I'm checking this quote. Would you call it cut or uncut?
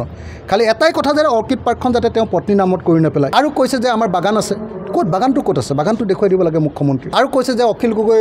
cut